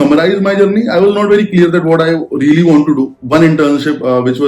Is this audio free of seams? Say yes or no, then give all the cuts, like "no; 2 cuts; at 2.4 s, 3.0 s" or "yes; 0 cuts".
no; 1 cut; at 3.2 s